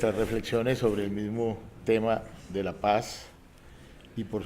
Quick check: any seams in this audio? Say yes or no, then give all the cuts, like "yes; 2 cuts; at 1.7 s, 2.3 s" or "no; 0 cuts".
yes; 1 cut; at 3.2 s